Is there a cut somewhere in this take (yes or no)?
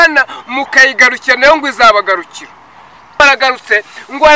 yes